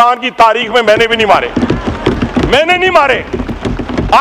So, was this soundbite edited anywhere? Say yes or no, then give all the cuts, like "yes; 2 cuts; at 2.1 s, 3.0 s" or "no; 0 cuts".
no; 0 cuts